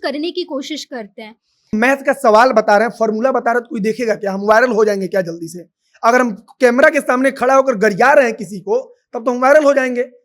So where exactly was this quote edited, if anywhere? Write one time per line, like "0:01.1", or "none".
0:01.7